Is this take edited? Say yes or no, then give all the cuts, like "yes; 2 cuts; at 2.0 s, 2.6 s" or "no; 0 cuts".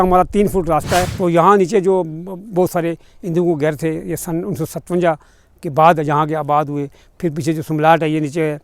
yes; 1 cut; at 1.1 s